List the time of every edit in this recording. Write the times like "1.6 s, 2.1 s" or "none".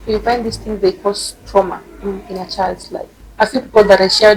3.1 s